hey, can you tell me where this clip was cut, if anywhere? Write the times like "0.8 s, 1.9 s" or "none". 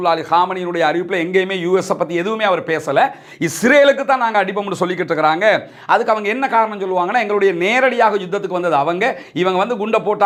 none